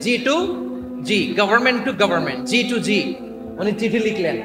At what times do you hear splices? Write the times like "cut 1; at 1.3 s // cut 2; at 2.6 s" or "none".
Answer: none